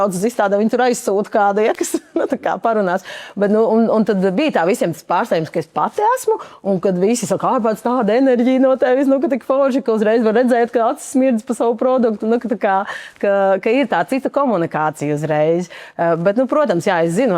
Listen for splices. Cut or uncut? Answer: uncut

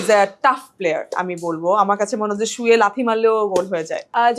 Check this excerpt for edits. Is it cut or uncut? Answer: uncut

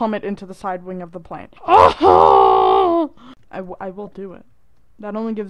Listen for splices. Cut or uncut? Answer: uncut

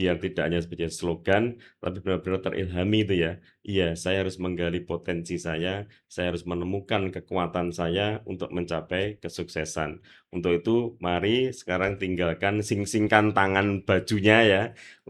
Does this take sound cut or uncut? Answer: uncut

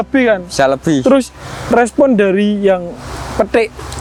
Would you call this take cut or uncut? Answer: uncut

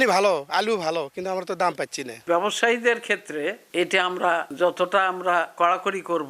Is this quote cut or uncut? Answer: cut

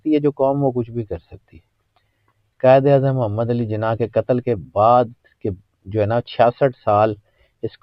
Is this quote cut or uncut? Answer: uncut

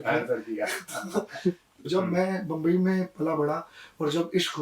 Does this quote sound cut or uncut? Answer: cut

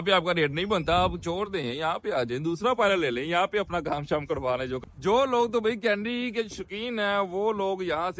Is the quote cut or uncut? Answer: cut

